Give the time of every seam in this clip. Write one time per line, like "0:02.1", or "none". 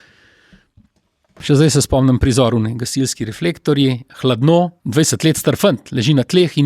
0:01.4
0:04.8